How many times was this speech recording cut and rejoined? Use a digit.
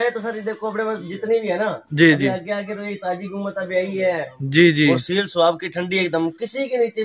0